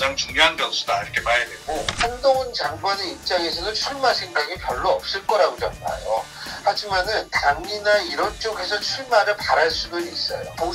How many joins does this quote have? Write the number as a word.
zero